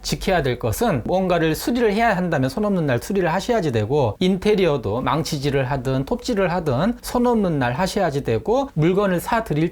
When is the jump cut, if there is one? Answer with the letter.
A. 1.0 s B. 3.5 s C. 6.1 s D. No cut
A